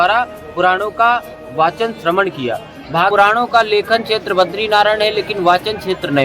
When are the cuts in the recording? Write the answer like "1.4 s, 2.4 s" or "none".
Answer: 3.1 s